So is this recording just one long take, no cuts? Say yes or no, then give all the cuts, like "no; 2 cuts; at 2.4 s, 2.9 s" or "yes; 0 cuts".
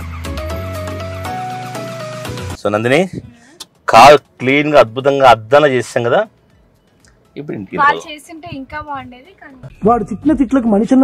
yes; 0 cuts